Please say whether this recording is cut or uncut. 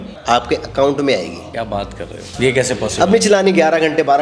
uncut